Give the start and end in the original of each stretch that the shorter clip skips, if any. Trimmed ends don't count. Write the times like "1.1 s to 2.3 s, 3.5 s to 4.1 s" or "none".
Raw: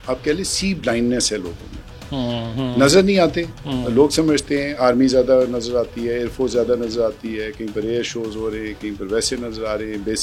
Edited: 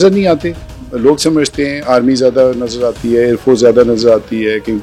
none